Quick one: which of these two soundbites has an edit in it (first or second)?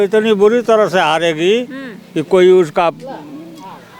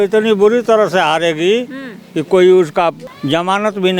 second